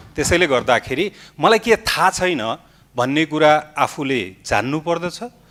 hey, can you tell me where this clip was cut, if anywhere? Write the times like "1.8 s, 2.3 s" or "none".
none